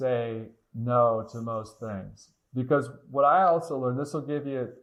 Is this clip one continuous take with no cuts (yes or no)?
yes